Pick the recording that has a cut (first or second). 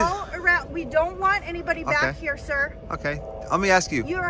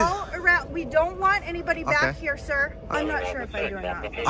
second